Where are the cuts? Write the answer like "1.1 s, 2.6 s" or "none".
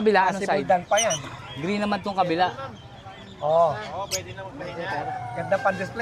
none